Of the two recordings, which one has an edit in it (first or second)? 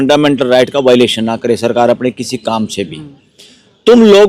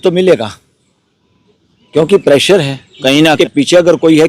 second